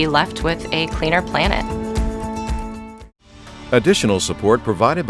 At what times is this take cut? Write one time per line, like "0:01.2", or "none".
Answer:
0:03.5

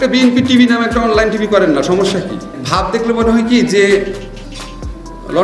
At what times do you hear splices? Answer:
0:02.9

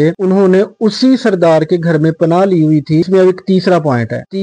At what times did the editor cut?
0:03.1

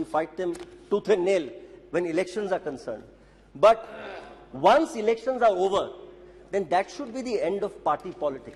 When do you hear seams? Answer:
none

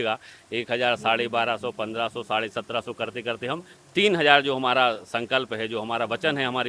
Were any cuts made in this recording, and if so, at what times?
none

